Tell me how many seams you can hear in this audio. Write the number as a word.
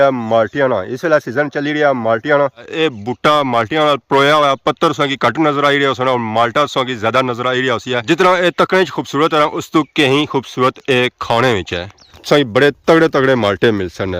three